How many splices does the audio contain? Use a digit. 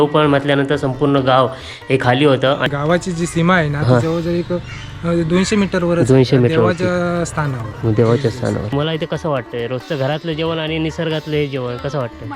2